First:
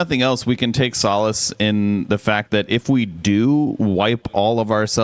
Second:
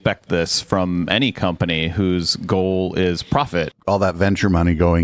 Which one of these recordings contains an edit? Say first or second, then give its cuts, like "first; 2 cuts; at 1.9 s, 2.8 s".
second; 1 cut; at 3.7 s